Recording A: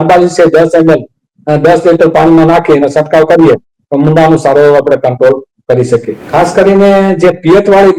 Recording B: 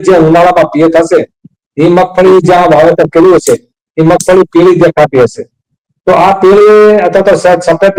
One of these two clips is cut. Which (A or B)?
A